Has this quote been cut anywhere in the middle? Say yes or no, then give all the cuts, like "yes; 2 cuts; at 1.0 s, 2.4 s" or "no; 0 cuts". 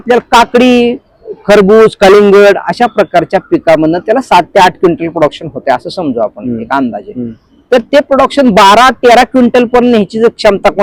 no; 0 cuts